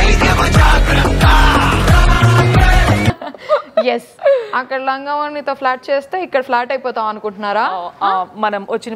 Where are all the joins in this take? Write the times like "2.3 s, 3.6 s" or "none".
none